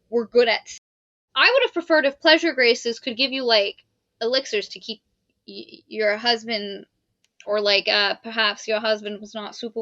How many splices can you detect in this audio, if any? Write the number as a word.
two